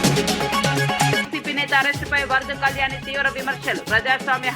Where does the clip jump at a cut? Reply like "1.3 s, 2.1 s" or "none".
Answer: 1.2 s